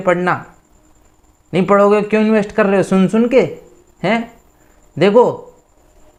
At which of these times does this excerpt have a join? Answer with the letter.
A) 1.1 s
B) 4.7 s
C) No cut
C